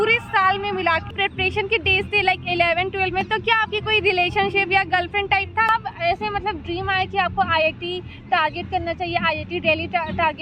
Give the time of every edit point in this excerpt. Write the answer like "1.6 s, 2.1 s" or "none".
1.1 s, 5.7 s